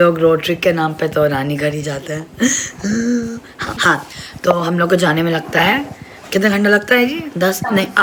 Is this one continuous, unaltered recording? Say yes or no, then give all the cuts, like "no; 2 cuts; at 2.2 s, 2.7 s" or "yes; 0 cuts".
yes; 0 cuts